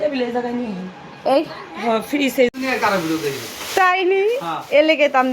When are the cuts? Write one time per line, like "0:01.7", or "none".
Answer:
0:02.5